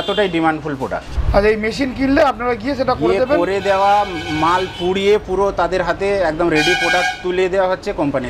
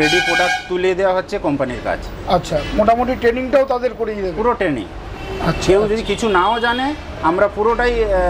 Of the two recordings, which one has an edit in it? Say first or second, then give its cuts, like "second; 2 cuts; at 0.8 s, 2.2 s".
first; 1 cut; at 1.1 s